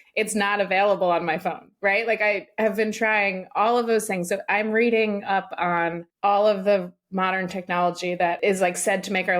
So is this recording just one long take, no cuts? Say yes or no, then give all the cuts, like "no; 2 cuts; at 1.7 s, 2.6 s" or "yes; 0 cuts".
no; 2 cuts; at 6.1 s, 8.4 s